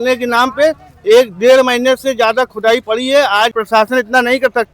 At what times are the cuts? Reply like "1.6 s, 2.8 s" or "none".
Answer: 3.7 s

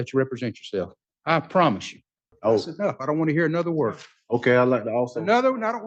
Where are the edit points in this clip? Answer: 1.0 s, 2.2 s

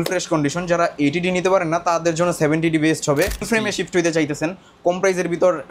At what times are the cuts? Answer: 3.5 s

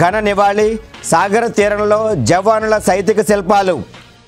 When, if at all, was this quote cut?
none

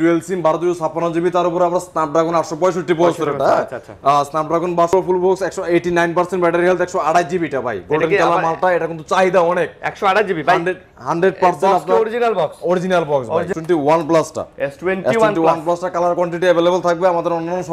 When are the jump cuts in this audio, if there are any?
4.9 s, 13.5 s

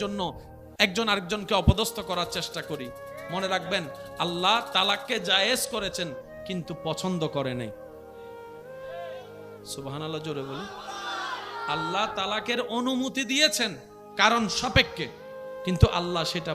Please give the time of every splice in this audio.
none

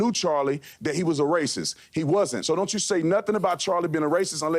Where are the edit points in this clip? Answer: 2.4 s

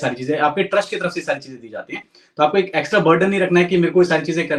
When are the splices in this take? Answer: none

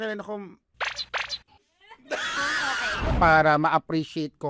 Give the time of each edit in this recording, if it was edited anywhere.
3.1 s

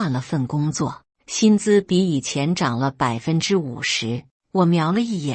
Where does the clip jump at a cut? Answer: 4.3 s

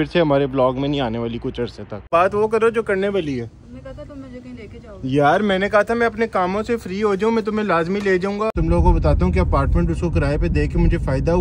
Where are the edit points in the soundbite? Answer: 2.1 s, 8.6 s

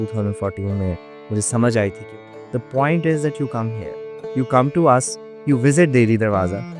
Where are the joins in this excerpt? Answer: 2.3 s

